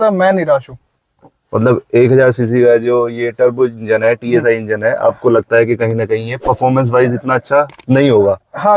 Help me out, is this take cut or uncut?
uncut